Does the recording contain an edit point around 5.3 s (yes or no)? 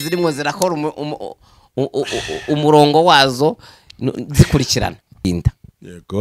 yes